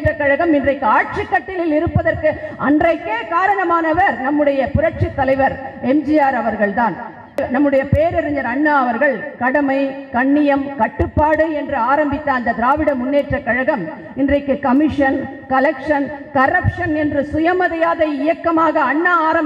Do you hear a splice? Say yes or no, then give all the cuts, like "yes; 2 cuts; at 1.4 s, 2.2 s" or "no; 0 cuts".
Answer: yes; 1 cut; at 7.4 s